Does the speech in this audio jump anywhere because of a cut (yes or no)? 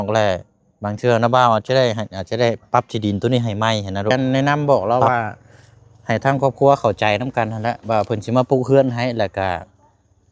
yes